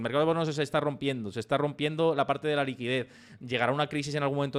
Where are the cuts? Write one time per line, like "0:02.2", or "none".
none